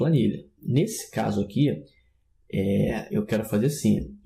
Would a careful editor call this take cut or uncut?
cut